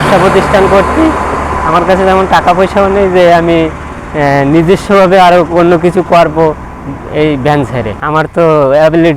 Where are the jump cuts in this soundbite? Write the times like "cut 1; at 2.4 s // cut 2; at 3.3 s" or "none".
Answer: cut 1; at 8.0 s